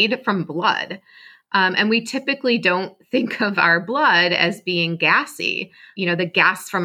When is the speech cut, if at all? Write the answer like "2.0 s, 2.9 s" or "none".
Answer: 5.9 s